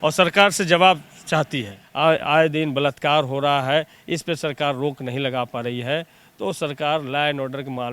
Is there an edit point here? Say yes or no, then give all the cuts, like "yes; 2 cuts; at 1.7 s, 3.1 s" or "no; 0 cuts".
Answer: yes; 1 cut; at 1.8 s